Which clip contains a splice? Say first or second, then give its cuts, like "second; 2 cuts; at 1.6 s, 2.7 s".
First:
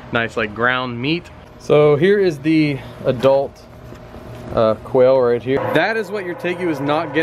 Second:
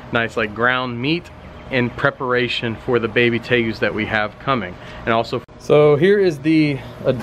first; 2 cuts; at 1.5 s, 5.6 s